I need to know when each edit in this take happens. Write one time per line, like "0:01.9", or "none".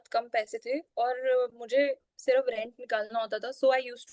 none

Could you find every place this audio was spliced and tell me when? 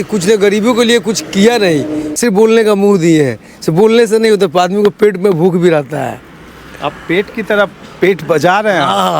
0:02.1

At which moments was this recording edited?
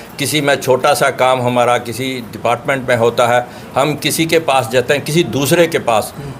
none

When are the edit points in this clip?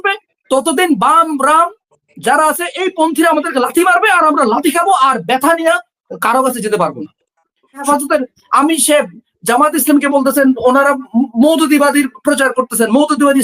0:07.8

